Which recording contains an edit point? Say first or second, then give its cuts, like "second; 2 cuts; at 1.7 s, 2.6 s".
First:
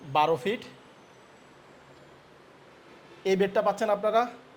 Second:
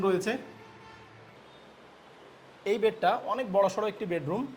second; 1 cut; at 1.3 s